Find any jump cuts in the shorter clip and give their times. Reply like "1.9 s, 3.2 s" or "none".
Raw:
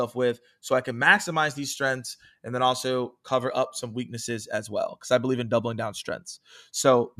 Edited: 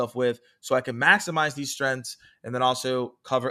none